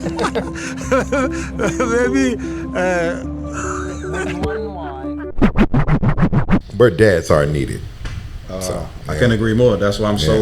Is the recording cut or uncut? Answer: cut